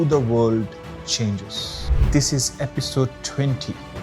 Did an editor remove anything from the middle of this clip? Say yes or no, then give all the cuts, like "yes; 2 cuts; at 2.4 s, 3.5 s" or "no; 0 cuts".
no; 0 cuts